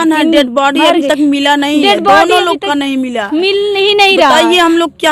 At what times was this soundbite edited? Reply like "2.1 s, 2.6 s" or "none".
none